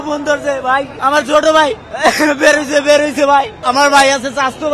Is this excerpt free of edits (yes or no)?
no